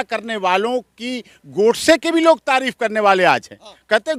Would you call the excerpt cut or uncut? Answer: uncut